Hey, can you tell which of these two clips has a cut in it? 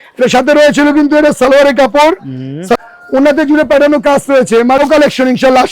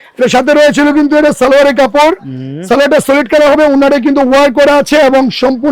first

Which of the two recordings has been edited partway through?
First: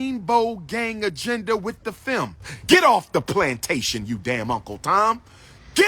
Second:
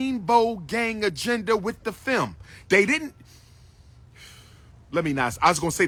first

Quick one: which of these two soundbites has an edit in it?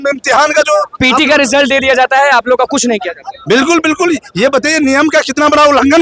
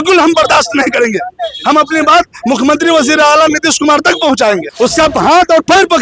second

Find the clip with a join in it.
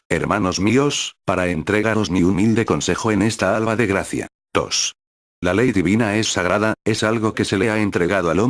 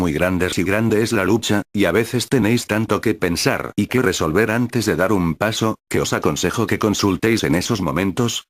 second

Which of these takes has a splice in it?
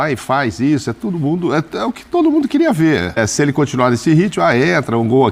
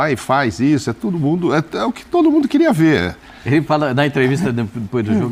first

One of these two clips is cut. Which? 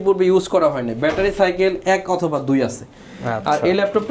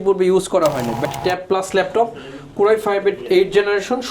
second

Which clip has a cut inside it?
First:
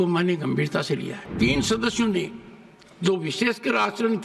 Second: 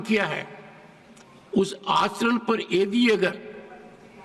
first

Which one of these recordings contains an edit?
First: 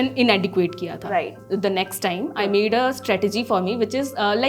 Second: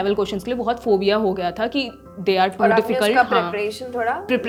first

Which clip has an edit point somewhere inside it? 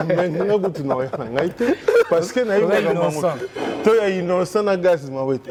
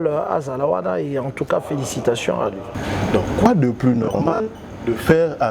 second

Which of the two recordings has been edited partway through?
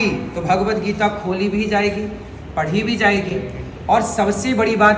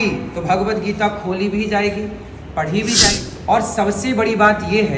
second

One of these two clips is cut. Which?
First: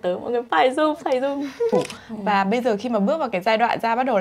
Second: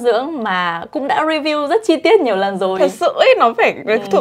first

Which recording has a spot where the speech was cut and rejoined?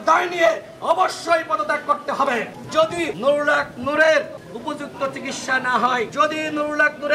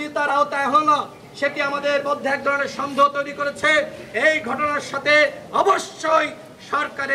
first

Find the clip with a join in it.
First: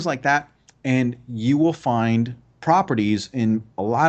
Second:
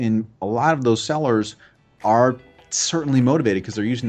first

